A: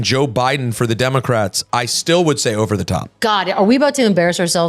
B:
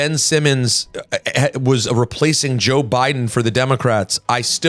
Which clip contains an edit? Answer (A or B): A